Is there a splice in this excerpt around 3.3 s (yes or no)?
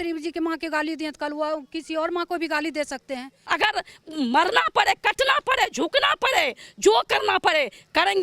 yes